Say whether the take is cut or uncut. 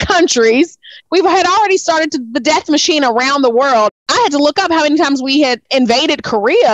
cut